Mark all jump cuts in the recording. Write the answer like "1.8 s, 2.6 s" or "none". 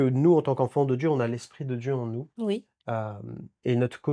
none